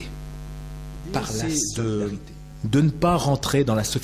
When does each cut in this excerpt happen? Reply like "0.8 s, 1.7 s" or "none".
1.4 s